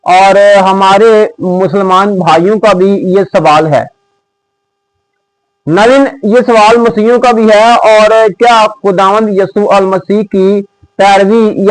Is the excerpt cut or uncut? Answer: uncut